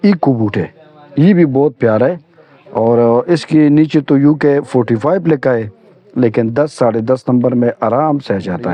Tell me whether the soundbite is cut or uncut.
uncut